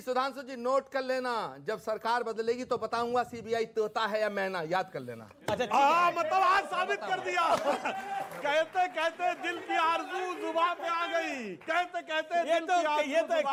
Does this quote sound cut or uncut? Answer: uncut